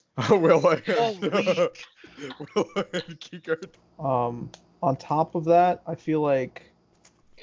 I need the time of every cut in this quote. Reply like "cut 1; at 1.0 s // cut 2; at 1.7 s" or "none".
cut 1; at 3.7 s